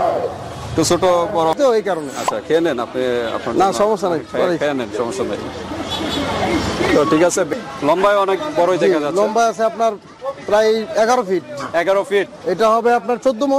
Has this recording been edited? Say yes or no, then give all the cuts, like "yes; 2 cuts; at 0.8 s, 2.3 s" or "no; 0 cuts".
yes; 3 cuts; at 1.5 s, 7.5 s, 12.3 s